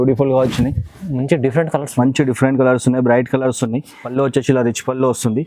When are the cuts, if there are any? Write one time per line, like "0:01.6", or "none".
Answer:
0:03.9